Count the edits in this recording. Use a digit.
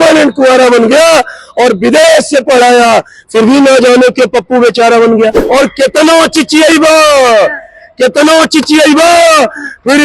1